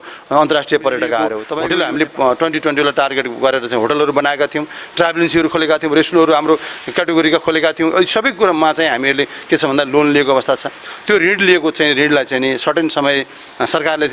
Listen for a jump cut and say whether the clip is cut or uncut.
cut